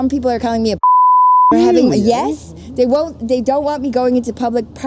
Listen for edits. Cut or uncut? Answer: uncut